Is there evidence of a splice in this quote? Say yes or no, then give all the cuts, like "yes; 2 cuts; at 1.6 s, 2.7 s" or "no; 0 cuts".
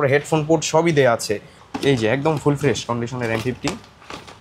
yes; 1 cut; at 1.5 s